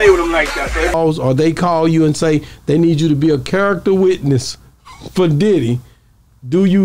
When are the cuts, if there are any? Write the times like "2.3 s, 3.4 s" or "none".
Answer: 0.9 s